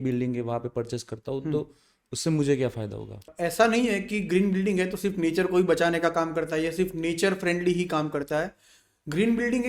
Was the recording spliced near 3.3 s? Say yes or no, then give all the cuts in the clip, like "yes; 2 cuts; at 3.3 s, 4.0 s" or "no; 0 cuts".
yes; 1 cut; at 3.3 s